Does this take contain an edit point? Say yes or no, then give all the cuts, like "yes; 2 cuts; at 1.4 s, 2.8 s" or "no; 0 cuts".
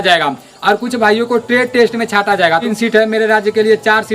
yes; 1 cut; at 2.6 s